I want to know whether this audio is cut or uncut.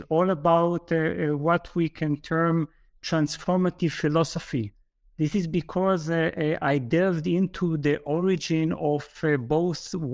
uncut